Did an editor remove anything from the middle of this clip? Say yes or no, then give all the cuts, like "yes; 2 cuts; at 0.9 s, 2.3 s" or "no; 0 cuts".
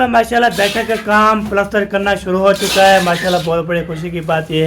no; 0 cuts